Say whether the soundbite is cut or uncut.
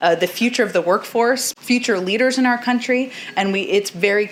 uncut